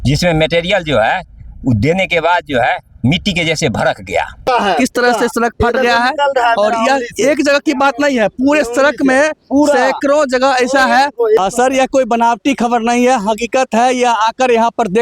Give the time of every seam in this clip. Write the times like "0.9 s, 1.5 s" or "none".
4.4 s, 11.4 s